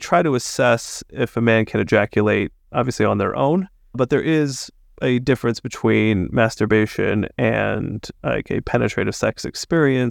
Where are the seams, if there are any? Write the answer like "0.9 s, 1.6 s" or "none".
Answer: 4.0 s